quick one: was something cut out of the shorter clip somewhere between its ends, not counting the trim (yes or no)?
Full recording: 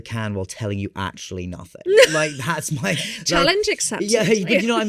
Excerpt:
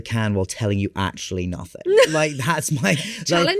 no